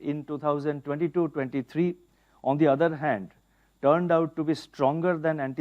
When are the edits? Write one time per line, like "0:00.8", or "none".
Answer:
none